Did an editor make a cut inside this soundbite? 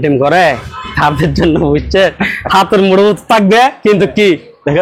no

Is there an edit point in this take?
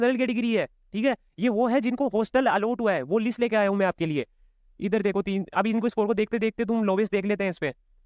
no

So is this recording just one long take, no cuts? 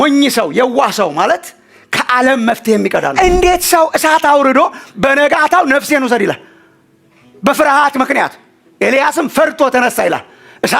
no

